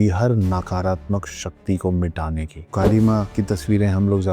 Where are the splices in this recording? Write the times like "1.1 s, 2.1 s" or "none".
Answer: 2.6 s, 3.3 s